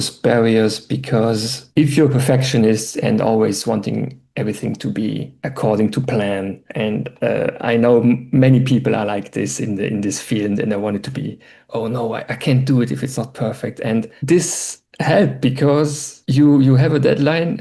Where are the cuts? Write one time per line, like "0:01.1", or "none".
none